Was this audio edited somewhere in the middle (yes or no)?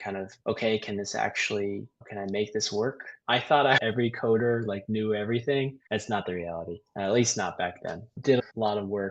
yes